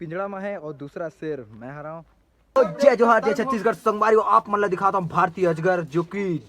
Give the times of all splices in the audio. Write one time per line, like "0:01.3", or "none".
0:02.5